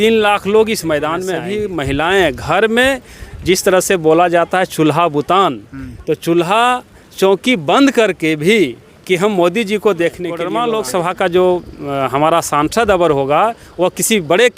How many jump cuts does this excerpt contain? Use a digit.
2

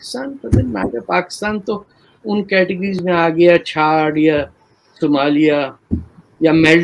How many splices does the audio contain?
0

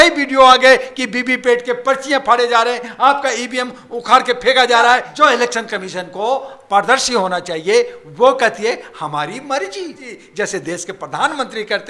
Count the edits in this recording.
2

